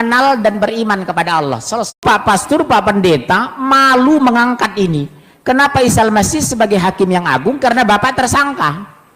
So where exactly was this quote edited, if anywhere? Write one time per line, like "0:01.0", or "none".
0:02.0